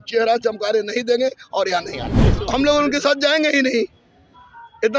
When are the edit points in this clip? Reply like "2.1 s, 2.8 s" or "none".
2.2 s